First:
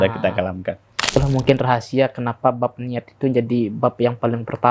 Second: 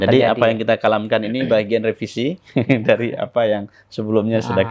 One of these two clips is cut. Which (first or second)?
first